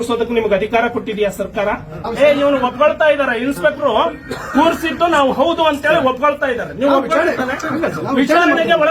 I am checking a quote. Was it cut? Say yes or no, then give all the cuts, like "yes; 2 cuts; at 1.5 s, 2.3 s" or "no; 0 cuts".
yes; 1 cut; at 2.0 s